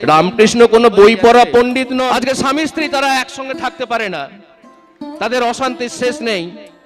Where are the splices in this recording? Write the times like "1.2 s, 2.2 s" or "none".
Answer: 2.0 s